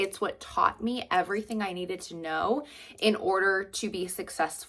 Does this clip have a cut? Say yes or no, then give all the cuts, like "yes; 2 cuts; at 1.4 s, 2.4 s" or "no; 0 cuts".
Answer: no; 0 cuts